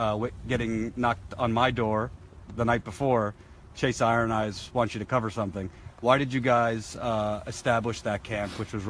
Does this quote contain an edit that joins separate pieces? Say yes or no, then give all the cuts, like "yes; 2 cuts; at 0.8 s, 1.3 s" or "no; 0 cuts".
yes; 1 cut; at 5.2 s